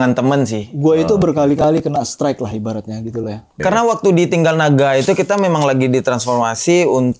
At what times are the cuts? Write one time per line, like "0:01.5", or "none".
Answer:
0:03.5